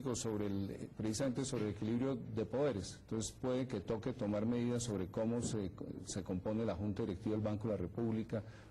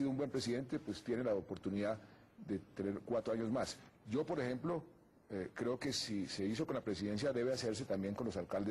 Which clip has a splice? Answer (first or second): second